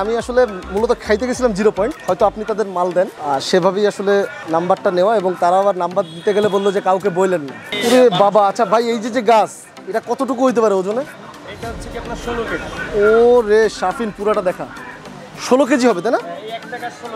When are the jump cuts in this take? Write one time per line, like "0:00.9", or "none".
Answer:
0:02.0
0:03.2
0:04.4
0:07.7